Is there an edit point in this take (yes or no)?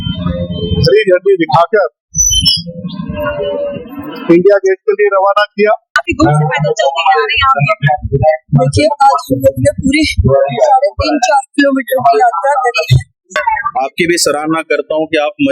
yes